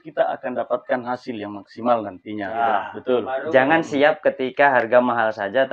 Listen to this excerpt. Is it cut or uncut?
cut